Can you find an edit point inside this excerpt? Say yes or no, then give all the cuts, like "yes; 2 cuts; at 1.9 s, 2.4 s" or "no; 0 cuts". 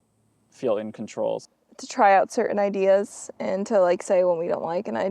yes; 1 cut; at 1.4 s